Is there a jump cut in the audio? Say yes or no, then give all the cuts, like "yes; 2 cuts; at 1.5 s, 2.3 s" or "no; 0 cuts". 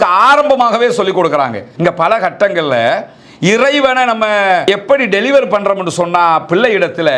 yes; 2 cuts; at 1.6 s, 4.7 s